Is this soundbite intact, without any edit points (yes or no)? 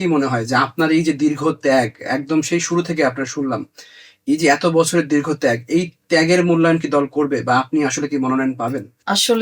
yes